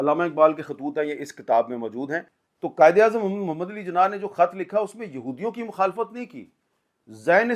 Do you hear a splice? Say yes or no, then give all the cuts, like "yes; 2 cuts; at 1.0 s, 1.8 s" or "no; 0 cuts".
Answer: yes; 1 cut; at 2.4 s